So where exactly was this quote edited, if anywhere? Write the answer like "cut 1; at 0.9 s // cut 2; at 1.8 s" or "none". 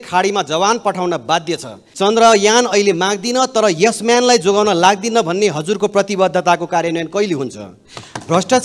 cut 1; at 1.8 s